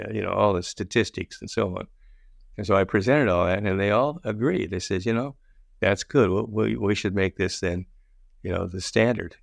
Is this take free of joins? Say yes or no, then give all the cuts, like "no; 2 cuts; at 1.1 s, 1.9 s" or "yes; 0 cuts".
yes; 0 cuts